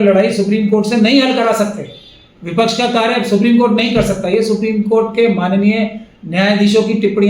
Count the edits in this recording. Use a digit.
0